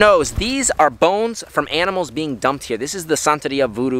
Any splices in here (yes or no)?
no